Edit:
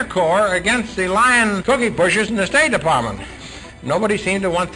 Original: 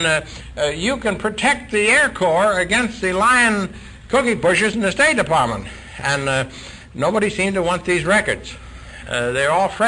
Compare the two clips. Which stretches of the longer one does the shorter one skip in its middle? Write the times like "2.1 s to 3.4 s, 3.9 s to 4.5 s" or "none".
3.7 s to 4.1 s, 5.9 s to 6.6 s